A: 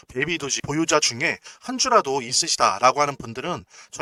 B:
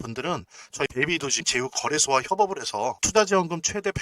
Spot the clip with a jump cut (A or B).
B